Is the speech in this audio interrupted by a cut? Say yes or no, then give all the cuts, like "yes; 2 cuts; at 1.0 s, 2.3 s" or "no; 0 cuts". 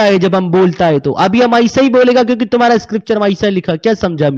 no; 0 cuts